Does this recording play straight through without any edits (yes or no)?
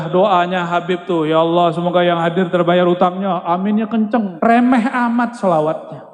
no